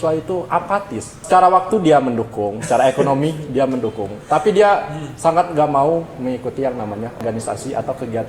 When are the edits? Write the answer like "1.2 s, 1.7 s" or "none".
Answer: 1.2 s, 7.2 s